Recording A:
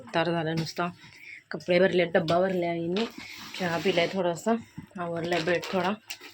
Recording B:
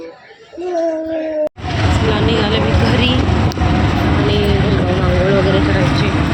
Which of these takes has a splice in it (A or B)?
B